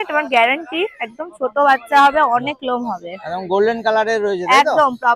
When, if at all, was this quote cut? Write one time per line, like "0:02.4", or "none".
none